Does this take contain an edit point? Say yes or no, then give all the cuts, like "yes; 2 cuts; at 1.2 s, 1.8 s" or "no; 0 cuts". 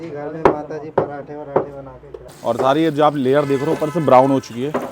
yes; 1 cut; at 2.3 s